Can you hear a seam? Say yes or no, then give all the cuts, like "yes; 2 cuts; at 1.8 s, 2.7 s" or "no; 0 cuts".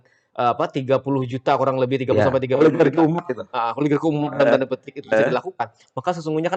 no; 0 cuts